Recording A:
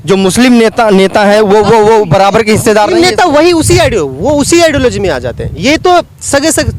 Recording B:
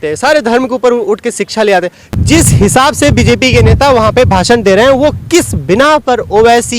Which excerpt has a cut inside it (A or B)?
B